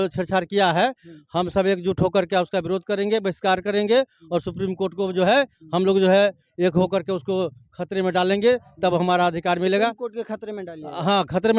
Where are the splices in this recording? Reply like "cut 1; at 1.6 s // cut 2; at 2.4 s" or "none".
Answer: none